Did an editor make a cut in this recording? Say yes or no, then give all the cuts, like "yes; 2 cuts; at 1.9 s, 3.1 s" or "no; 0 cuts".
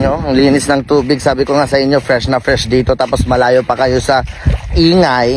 no; 0 cuts